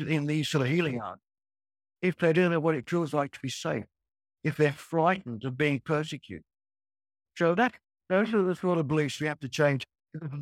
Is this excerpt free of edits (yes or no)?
yes